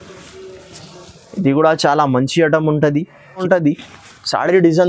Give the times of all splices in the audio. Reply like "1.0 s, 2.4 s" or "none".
3.4 s